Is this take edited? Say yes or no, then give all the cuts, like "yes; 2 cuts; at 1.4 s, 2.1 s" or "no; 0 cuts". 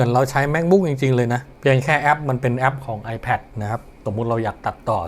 yes; 2 cuts; at 1.5 s, 4.0 s